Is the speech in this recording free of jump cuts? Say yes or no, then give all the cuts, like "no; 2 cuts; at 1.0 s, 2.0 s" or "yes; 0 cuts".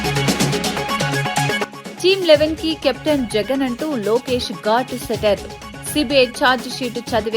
no; 1 cut; at 1.7 s